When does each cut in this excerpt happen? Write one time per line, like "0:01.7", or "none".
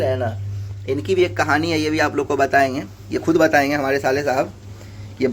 none